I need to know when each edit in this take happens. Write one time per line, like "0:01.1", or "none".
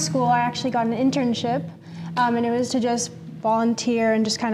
none